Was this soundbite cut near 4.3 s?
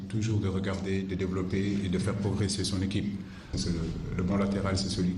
yes; 1 cut; at 4.3 s

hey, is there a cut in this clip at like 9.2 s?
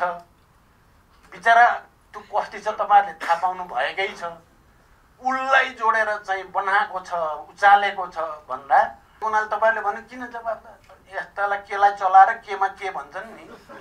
yes; 1 cut; at 9.2 s

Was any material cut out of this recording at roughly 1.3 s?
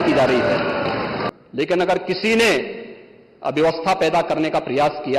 yes; 1 cut; at 1.3 s

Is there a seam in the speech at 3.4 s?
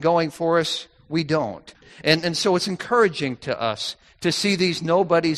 no; 1 cut; at 1.9 s

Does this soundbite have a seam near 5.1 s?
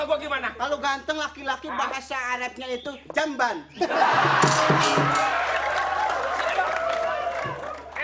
yes; 1 cut; at 5.1 s

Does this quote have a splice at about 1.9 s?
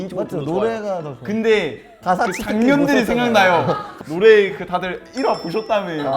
yes; 2 cuts; at 1.9 s, 3.8 s

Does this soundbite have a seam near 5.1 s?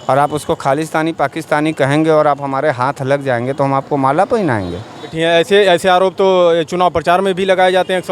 yes; 1 cut; at 5.1 s

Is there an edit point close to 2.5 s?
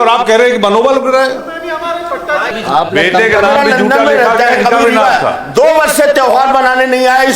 yes; 1 cut; at 2.5 s

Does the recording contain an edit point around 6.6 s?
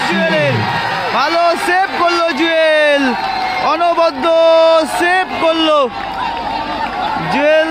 no; 0 cuts

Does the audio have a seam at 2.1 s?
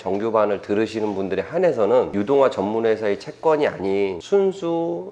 yes; 1 cut; at 2.1 s

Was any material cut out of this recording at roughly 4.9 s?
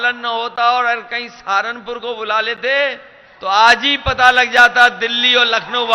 no; 0 cuts

